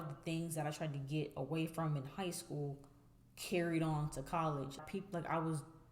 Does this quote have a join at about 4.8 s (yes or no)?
yes